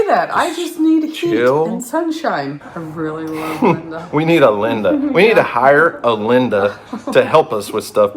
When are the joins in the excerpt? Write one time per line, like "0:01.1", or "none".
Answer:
0:02.6